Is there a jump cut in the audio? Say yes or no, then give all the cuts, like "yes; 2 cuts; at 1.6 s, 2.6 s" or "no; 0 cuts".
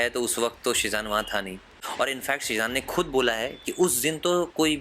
yes; 1 cut; at 1.7 s